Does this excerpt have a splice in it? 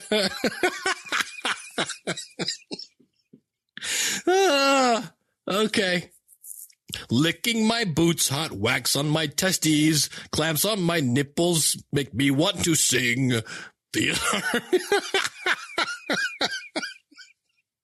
no; 0 cuts

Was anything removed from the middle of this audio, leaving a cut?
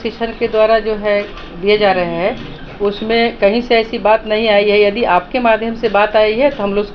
no; 0 cuts

